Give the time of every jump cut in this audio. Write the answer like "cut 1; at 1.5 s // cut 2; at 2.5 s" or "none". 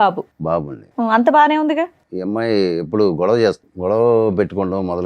cut 1; at 2.1 s // cut 2; at 3.7 s